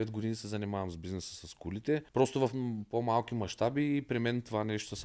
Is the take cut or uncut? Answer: cut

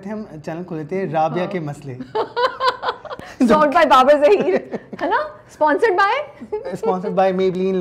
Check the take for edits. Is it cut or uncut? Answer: uncut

